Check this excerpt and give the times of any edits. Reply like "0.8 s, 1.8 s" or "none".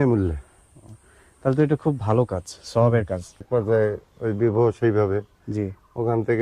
3.5 s